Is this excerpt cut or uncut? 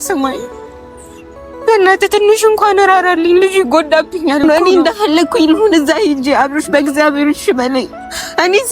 cut